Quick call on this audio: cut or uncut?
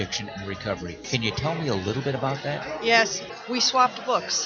cut